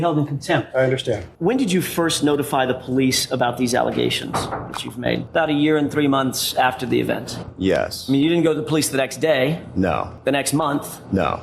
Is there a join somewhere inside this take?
yes; 3 cuts; at 1.3 s, 5.2 s, 10.1 s

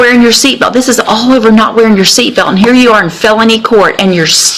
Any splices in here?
no; 0 cuts

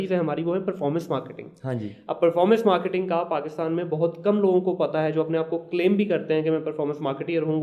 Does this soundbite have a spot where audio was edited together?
no; 0 cuts

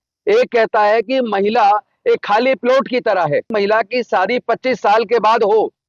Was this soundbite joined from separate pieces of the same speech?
yes; 1 cut; at 3.5 s

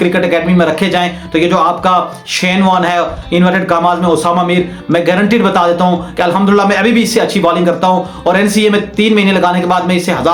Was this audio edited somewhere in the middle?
no; 0 cuts

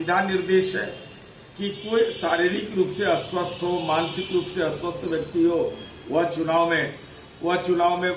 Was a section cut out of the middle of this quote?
no; 0 cuts

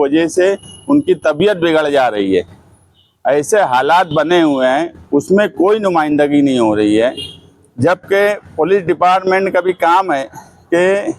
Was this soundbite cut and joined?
no; 0 cuts

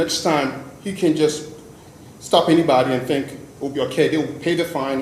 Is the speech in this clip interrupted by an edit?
no; 0 cuts

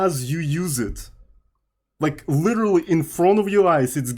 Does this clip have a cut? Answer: no; 0 cuts

